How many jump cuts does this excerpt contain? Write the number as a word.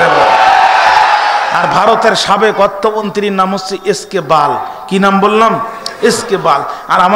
one